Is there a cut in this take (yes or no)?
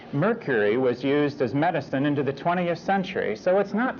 yes